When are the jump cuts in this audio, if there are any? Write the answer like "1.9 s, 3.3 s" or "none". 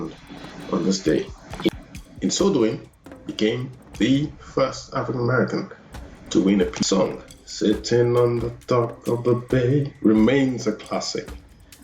1.7 s, 6.8 s